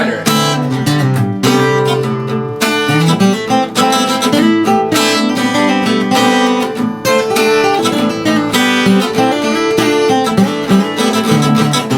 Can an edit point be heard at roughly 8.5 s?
yes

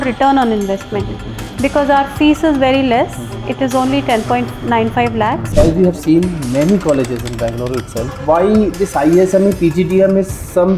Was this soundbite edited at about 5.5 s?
yes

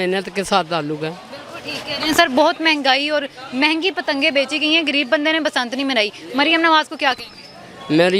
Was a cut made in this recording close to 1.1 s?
no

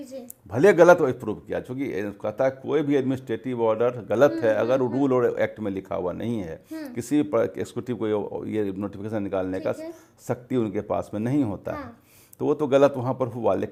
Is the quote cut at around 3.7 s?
no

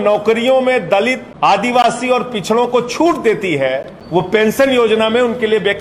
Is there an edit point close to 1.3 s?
yes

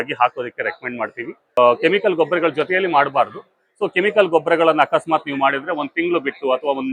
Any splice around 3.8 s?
no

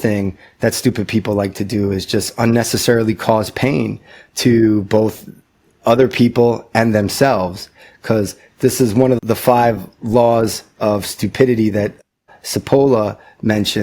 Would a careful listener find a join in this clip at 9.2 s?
yes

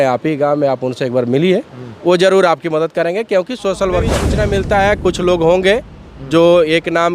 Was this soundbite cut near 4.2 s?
yes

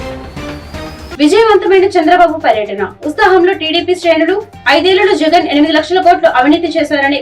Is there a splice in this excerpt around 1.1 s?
yes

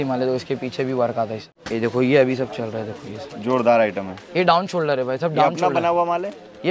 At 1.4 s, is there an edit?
yes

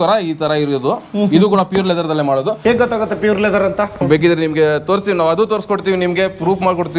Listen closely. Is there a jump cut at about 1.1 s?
no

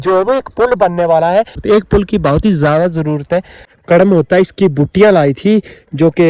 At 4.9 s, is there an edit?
no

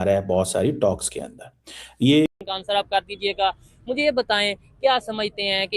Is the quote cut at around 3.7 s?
no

